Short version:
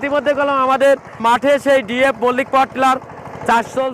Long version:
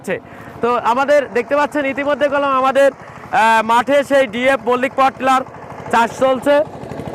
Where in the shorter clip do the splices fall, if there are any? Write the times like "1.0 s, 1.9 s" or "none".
1.2 s